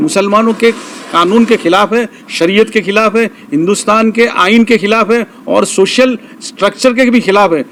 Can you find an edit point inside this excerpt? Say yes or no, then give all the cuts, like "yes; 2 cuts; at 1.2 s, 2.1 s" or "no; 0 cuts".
no; 0 cuts